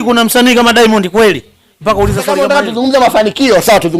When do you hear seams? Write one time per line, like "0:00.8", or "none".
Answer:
0:02.3